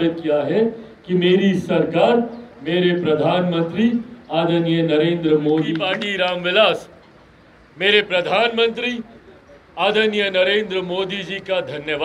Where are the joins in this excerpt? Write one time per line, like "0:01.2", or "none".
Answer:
0:05.8